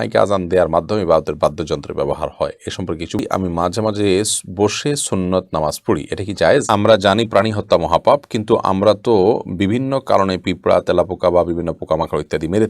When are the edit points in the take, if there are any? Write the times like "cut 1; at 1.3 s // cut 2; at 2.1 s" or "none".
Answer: cut 1; at 3.2 s // cut 2; at 6.6 s